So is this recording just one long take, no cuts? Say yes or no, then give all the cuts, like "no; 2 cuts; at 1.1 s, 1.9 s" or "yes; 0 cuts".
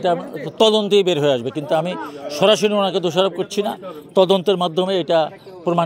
yes; 0 cuts